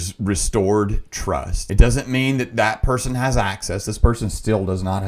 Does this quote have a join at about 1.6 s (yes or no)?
yes